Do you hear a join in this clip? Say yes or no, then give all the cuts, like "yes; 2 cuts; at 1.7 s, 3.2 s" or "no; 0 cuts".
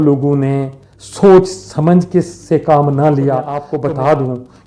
yes; 1 cut; at 3.7 s